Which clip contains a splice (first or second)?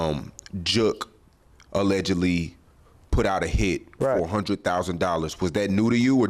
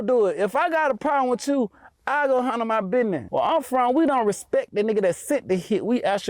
second